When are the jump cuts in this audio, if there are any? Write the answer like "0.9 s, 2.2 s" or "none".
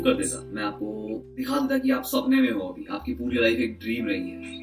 1.3 s